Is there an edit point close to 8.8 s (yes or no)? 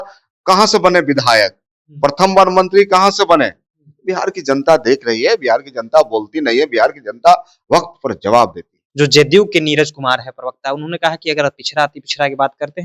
yes